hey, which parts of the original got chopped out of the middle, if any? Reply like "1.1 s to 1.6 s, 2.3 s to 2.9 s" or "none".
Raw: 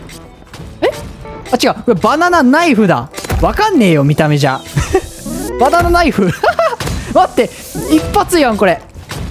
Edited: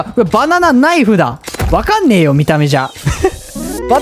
none